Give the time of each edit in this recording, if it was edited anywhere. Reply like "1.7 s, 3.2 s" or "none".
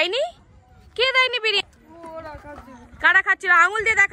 1.6 s